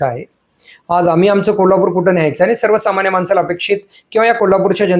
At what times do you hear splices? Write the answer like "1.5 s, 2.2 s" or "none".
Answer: none